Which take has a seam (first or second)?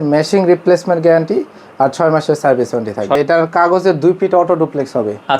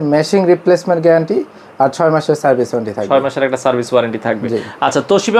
first